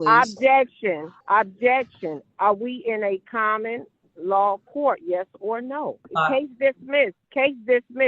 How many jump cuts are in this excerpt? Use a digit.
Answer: 3